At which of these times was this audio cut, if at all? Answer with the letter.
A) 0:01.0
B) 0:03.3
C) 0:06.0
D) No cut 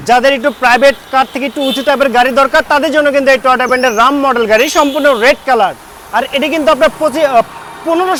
D